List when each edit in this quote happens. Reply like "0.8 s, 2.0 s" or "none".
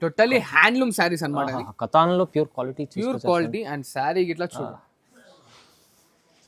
none